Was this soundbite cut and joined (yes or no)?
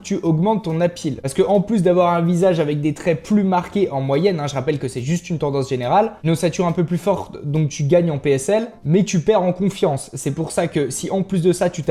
no